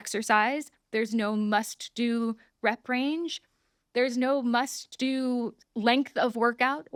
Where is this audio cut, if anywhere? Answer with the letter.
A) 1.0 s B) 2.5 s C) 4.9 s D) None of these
D